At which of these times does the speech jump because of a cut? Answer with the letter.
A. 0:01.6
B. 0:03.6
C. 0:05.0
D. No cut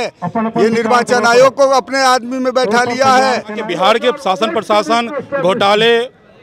B